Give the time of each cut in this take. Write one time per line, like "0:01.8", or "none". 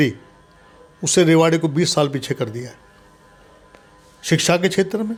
none